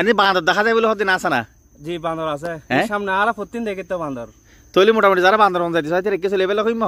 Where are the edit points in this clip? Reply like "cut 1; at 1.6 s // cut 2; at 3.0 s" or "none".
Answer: none